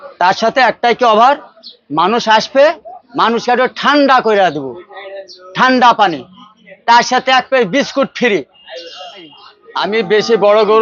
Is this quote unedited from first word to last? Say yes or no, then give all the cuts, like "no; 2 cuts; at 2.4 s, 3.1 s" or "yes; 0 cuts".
no; 1 cut; at 9.9 s